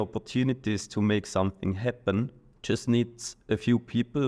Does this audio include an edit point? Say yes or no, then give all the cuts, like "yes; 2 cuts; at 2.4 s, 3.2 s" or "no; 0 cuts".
yes; 1 cut; at 2.4 s